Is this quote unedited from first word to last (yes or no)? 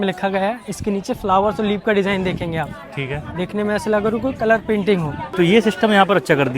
no